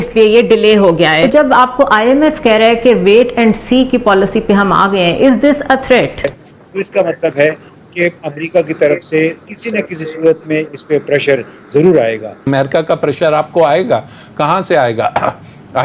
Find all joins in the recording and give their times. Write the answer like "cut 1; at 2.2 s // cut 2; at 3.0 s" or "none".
cut 1; at 1.2 s // cut 2; at 6.3 s // cut 3; at 12.4 s